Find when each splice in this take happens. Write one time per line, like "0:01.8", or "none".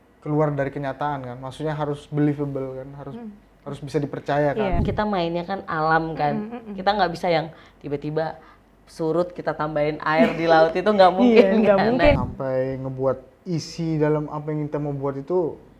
0:04.8
0:12.2